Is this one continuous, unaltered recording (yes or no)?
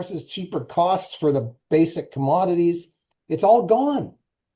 yes